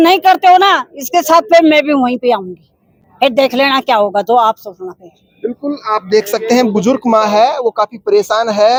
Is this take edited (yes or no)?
no